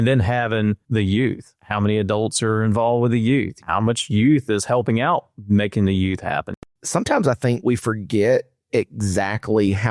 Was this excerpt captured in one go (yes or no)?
no